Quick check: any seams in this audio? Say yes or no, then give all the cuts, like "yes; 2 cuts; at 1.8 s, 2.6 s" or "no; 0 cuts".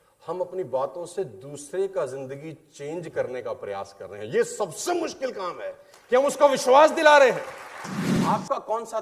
yes; 1 cut; at 8.1 s